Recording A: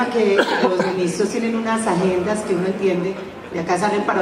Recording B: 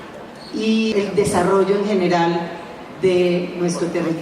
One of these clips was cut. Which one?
B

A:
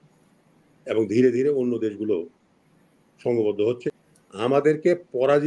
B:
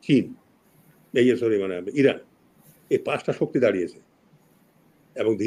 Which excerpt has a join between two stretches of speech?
A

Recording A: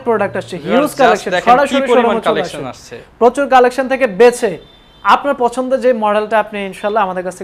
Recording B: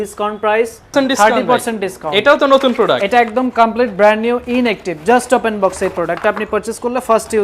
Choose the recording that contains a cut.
B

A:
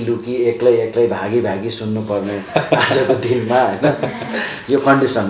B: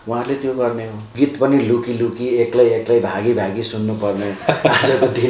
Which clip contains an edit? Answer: B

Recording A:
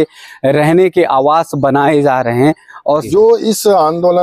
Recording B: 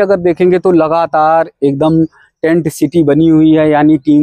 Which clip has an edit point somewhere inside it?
A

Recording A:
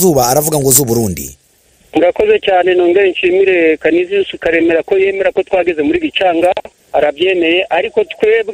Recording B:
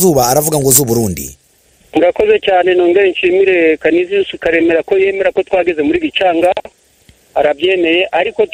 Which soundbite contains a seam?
A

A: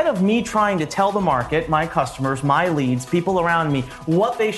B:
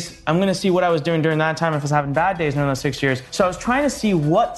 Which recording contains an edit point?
B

